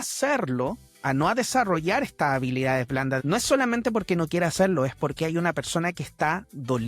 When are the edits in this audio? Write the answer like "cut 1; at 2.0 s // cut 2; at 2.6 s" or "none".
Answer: cut 1; at 3.2 s